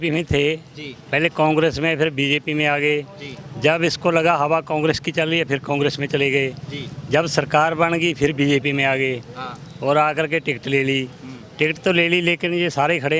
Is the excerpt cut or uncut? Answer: uncut